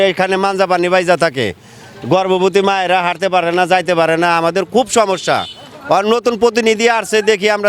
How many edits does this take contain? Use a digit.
0